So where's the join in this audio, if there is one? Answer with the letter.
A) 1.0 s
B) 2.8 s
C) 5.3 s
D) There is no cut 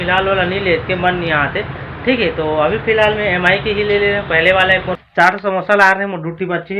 C